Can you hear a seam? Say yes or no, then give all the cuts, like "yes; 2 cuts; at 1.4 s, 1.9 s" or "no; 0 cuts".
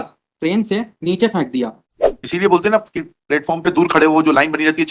yes; 1 cut; at 1.8 s